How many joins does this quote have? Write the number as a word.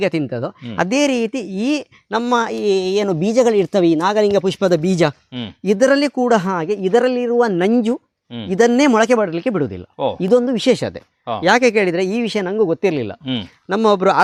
zero